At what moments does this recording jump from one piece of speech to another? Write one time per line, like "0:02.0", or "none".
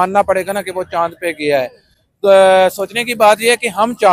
none